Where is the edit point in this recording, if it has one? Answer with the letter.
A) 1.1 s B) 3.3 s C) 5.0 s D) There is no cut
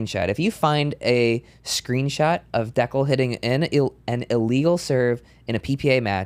D